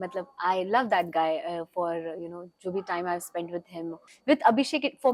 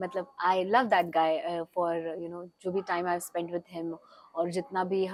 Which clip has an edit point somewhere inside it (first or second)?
first